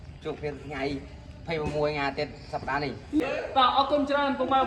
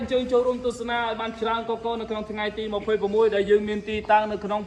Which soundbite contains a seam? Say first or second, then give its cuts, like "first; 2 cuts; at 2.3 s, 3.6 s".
first; 1 cut; at 3.2 s